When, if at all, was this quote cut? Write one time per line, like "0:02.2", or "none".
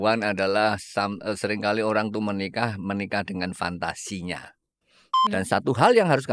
0:05.1